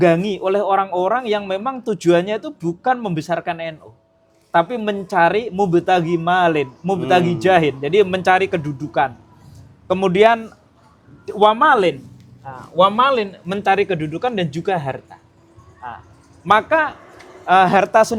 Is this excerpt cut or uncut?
uncut